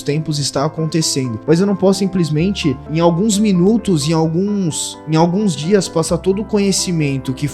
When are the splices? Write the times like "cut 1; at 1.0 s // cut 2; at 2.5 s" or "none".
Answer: cut 1; at 1.4 s // cut 2; at 2.8 s